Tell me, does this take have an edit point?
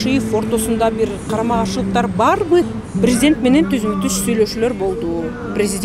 yes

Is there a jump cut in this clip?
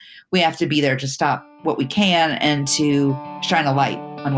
yes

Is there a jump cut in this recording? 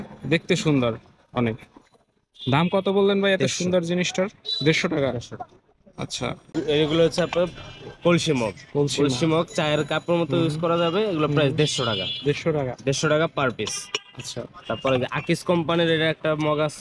yes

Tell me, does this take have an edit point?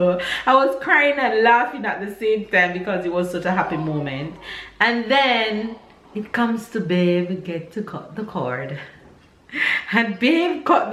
no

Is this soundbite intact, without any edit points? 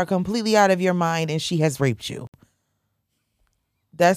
yes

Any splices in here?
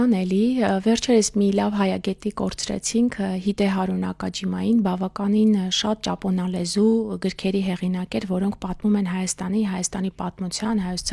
no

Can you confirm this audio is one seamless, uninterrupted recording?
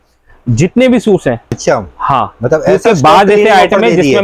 no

